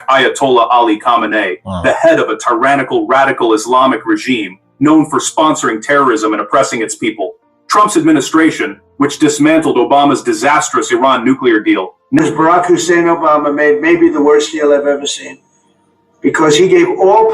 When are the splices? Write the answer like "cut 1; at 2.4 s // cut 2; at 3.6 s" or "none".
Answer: cut 1; at 12.2 s